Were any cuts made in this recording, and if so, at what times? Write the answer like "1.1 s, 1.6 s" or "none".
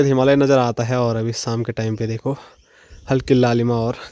none